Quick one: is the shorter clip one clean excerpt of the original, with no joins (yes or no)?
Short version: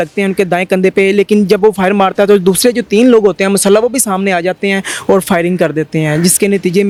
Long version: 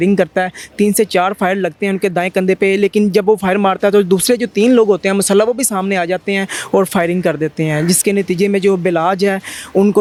yes